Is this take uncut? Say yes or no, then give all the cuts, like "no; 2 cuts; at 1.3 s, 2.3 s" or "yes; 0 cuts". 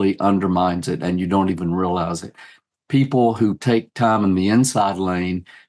yes; 0 cuts